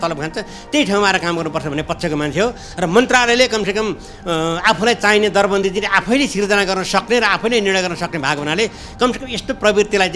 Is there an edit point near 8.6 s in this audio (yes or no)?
no